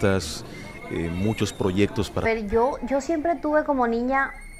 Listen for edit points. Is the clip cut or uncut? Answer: uncut